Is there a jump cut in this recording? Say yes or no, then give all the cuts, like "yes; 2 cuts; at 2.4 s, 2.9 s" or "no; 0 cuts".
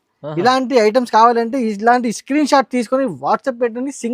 no; 0 cuts